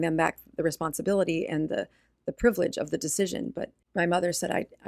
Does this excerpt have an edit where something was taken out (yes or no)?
yes